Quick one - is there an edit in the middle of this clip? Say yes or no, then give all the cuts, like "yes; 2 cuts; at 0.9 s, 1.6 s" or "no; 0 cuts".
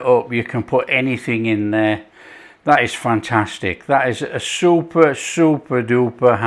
no; 0 cuts